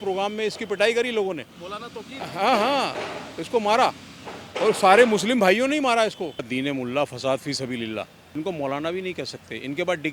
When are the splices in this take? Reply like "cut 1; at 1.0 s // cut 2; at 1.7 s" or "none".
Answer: cut 1; at 6.5 s // cut 2; at 8.2 s

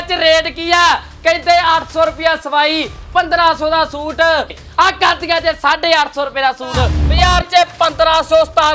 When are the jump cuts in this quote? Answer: cut 1; at 4.6 s // cut 2; at 7.0 s

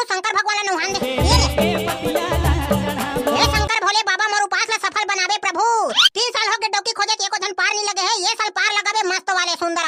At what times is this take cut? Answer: none

